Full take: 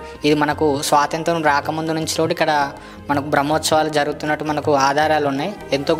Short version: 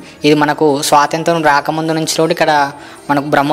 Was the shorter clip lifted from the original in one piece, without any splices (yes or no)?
yes